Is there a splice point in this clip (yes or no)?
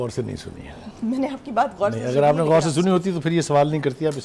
no